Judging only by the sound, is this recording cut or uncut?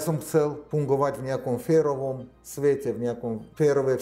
uncut